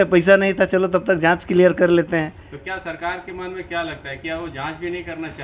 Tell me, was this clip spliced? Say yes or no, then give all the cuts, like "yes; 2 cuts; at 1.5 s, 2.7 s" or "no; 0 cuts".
no; 0 cuts